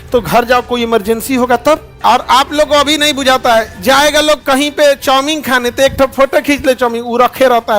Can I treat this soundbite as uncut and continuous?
no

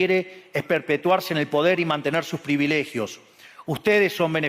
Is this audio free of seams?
yes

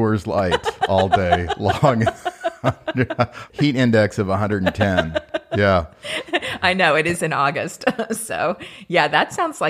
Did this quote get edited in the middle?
no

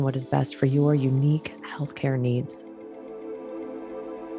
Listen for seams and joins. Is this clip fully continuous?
no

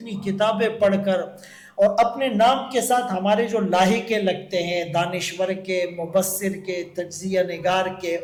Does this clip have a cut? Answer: no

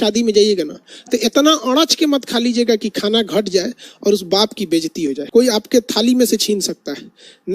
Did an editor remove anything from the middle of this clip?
yes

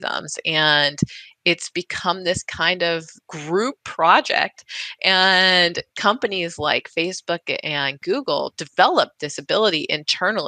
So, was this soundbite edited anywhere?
no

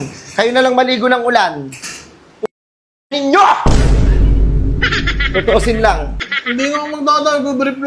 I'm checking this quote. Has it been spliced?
yes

